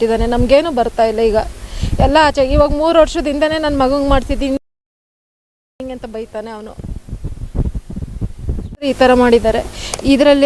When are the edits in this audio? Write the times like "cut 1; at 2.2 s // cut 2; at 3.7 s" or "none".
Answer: cut 1; at 8.9 s